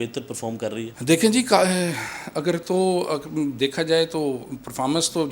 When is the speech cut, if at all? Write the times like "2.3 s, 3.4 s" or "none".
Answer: none